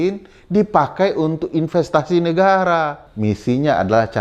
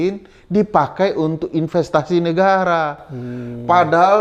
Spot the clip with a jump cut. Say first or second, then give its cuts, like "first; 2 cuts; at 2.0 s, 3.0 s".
first; 1 cut; at 3.0 s